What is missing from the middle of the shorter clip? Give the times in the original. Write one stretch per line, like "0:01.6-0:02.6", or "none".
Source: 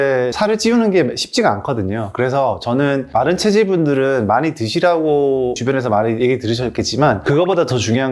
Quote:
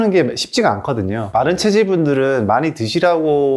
0:02.1-0:03.1